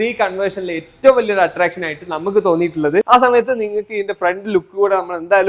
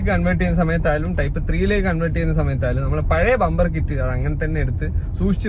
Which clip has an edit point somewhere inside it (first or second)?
first